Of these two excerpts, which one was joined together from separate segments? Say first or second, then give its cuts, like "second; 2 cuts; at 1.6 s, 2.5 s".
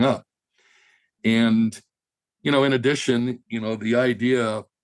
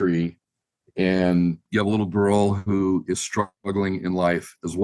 second; 1 cut; at 1.6 s